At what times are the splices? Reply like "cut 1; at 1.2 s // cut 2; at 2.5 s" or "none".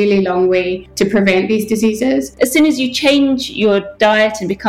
cut 1; at 2.3 s